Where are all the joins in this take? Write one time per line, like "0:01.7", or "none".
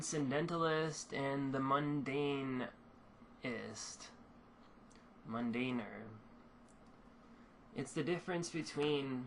0:00.9